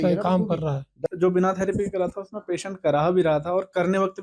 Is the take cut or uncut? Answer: cut